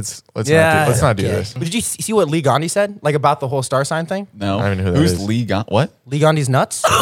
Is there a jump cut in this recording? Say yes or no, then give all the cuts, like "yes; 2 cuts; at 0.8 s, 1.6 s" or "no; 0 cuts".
yes; 1 cut; at 1.5 s